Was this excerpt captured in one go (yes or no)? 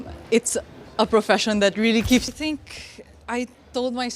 no